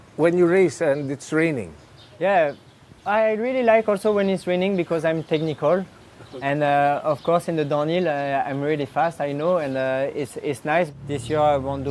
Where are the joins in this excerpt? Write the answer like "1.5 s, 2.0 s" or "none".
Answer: 10.9 s